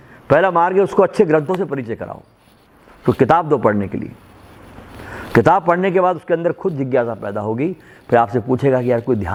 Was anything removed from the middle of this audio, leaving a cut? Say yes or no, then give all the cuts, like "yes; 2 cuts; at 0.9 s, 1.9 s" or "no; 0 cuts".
no; 0 cuts